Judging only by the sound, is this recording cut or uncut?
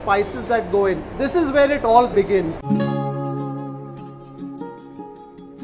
cut